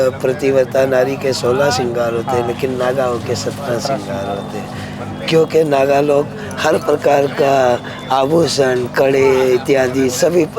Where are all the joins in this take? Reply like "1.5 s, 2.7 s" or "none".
none